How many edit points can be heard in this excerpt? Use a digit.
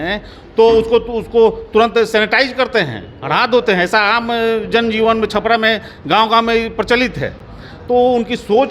0